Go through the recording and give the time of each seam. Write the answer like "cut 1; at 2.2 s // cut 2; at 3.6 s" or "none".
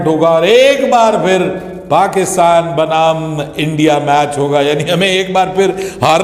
none